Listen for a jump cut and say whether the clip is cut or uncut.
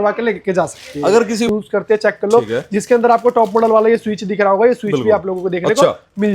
cut